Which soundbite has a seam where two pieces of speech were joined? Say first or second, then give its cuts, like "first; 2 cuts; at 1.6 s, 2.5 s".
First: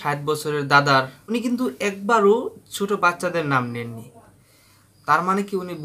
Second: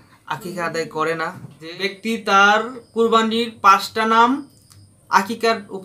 second; 1 cut; at 1.7 s